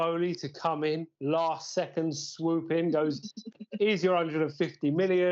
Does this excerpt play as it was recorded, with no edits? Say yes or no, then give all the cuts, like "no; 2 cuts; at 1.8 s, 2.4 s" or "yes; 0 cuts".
yes; 0 cuts